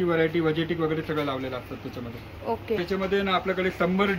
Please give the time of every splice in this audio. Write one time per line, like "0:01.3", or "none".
none